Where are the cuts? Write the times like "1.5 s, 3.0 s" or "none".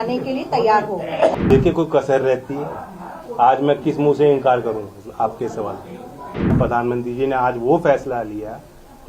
1.4 s, 6.5 s